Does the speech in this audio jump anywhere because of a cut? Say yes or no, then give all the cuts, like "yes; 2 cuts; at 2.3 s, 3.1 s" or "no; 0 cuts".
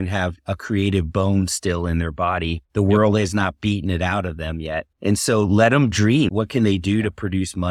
no; 0 cuts